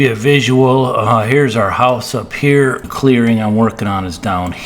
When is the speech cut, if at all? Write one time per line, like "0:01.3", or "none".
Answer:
0:02.8